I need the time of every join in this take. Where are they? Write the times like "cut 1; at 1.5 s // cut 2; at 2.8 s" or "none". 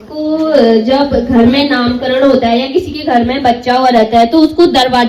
none